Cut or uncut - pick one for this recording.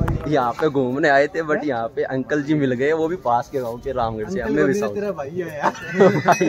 uncut